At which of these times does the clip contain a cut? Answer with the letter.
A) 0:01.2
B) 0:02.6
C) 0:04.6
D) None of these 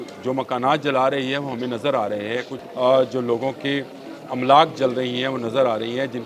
B